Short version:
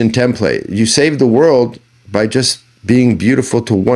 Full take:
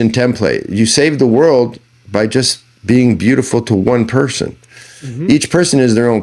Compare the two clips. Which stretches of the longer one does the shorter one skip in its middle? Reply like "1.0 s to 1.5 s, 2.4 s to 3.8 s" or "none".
none